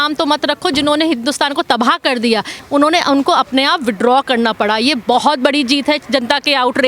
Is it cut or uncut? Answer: cut